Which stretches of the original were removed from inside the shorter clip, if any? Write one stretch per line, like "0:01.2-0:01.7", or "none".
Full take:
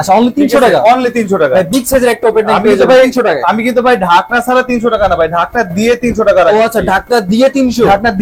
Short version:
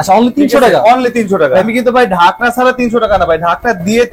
0:01.7-0:03.6